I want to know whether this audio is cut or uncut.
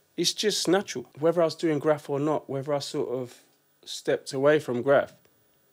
cut